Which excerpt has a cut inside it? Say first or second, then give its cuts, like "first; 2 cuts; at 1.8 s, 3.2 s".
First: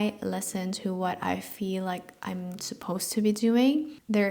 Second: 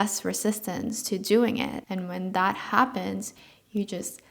second; 1 cut; at 1.8 s